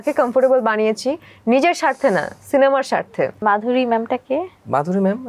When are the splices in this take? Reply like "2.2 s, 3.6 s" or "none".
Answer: 3.4 s

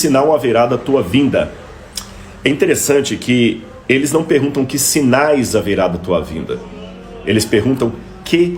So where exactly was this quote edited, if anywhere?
none

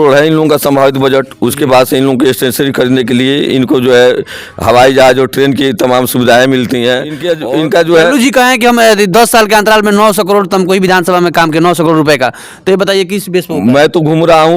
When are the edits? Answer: 7.2 s

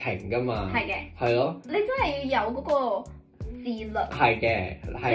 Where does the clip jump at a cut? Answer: 1.6 s

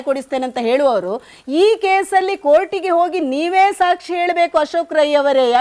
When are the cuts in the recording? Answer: none

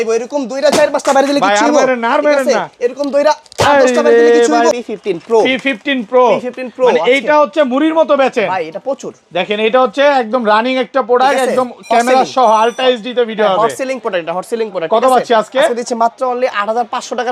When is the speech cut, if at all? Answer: 4.7 s

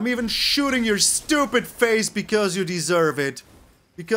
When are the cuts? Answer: none

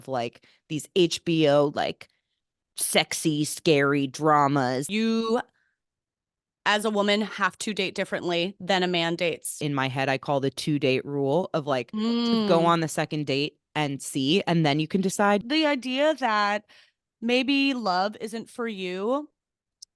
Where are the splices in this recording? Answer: 4.8 s, 9.6 s, 15.4 s

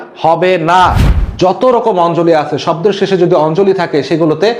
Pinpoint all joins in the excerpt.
1.1 s

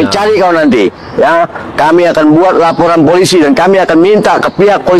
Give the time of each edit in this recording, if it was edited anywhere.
none

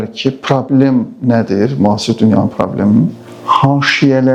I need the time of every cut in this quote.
none

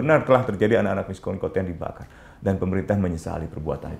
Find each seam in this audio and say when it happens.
none

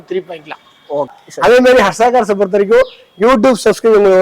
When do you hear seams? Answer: 1.2 s

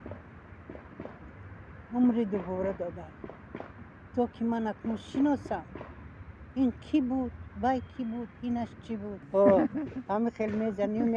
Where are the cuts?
9.2 s

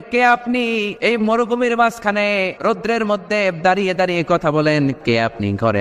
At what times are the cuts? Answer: 0.9 s, 2.5 s, 5.0 s

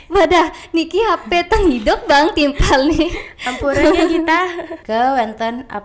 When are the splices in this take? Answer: 4.8 s

